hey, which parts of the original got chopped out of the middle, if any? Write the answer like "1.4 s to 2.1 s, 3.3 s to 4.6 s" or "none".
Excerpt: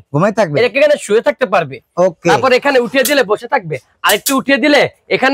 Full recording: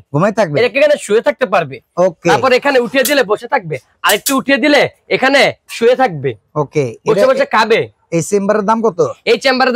none